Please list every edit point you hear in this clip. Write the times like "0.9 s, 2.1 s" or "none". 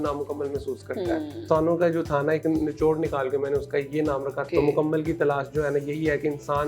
1.4 s, 4.4 s